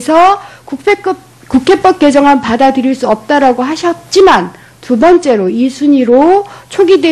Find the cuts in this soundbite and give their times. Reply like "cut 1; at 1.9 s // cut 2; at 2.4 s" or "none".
cut 1; at 6.0 s